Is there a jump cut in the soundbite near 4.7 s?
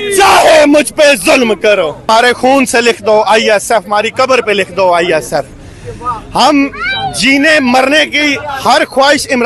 no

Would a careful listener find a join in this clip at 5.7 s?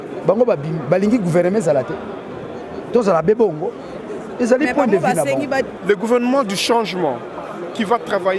yes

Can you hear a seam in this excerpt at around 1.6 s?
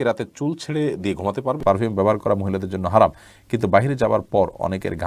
yes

